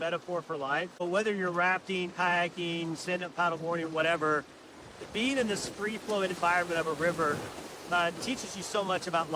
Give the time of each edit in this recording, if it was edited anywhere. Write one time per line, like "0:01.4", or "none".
0:01.0